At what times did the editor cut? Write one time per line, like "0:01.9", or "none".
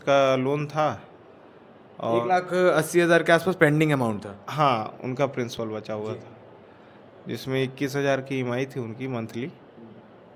none